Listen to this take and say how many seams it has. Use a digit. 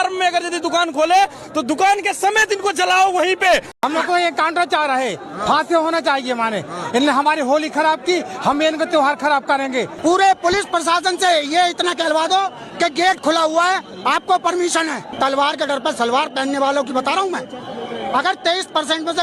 3